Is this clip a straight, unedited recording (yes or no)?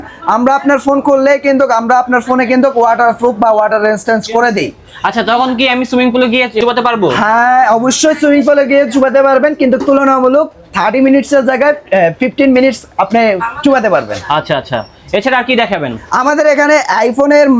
yes